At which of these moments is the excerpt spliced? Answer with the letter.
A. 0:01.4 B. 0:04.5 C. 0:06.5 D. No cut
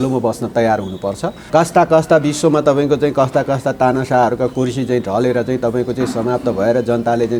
A